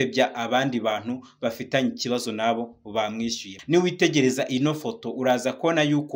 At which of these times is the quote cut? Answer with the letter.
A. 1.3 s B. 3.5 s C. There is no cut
B